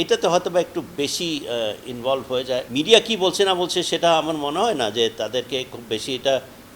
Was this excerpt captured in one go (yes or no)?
no